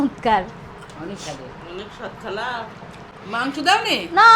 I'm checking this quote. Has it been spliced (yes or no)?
yes